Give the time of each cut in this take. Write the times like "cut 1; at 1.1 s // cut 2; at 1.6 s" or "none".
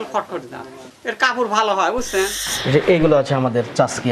cut 1; at 2.4 s